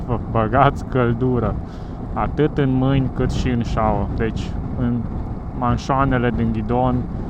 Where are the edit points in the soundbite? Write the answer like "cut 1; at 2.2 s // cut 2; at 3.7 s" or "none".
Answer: none